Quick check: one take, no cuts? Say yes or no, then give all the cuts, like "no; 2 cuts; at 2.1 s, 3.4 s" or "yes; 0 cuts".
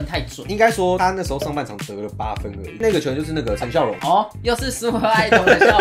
yes; 0 cuts